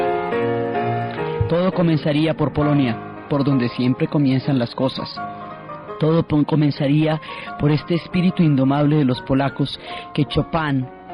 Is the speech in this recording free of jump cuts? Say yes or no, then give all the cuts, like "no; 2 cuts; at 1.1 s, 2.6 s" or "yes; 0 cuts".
yes; 0 cuts